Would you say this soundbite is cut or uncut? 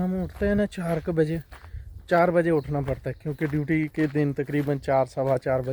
uncut